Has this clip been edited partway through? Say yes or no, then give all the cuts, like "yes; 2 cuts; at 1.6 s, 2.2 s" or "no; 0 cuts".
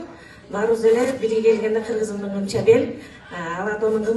no; 0 cuts